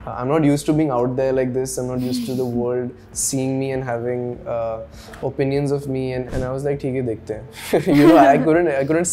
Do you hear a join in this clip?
yes; 1 cut; at 6.3 s

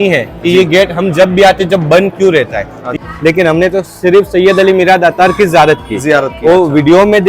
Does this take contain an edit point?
yes; 1 cut; at 2.9 s

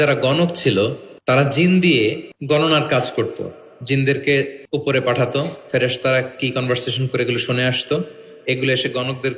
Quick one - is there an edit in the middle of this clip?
yes; 3 cuts; at 1.1 s, 2.3 s, 4.6 s

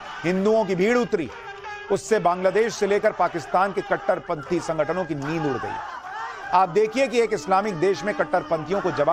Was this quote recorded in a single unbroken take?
no; 1 cut; at 4.0 s

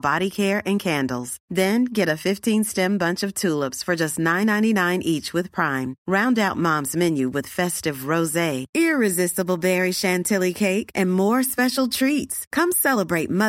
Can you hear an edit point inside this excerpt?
no; 0 cuts

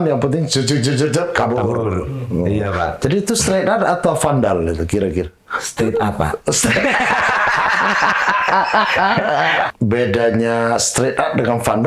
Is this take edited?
yes; 1 cut; at 9.7 s

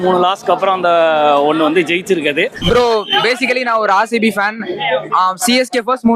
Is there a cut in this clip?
yes; 1 cut; at 2.6 s

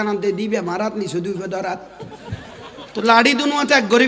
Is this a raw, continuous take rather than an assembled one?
yes; 0 cuts

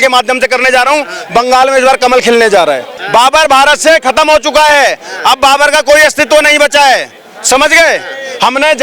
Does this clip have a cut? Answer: yes; 1 cut; at 2.9 s

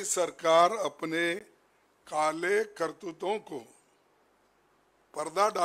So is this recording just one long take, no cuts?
yes; 0 cuts

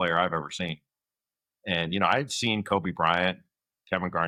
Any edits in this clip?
no; 0 cuts

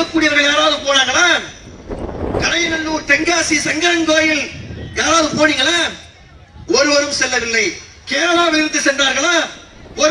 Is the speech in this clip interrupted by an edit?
no; 0 cuts

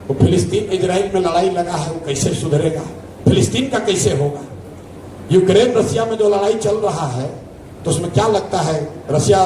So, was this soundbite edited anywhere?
no; 0 cuts

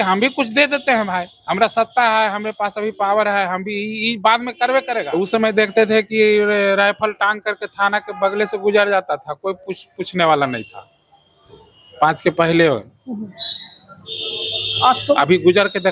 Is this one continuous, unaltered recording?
no; 1 cut; at 5.2 s

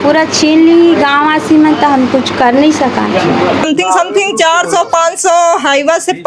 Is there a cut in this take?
yes; 1 cut; at 3.7 s

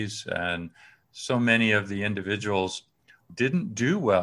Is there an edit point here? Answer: yes; 1 cut; at 3.3 s

